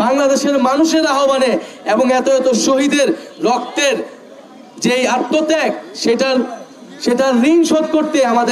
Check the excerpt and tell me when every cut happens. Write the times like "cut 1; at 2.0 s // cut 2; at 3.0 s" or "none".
none